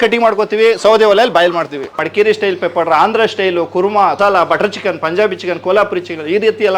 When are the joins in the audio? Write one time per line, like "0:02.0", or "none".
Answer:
0:02.0
0:04.2